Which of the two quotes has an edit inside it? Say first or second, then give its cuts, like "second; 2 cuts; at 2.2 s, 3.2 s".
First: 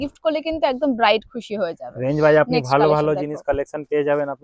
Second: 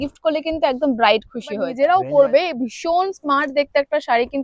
second; 1 cut; at 1.7 s